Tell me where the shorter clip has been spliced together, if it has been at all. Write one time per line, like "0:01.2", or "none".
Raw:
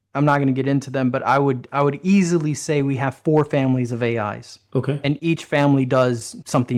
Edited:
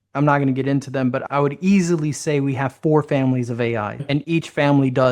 0:01.2
0:04.0